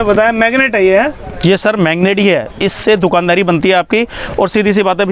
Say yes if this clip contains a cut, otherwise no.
no